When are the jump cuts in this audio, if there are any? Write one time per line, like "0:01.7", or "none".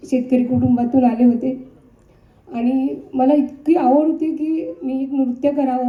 none